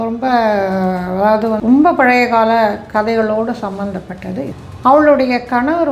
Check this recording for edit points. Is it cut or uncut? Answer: cut